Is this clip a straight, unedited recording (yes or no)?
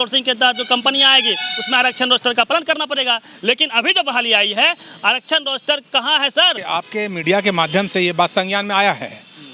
no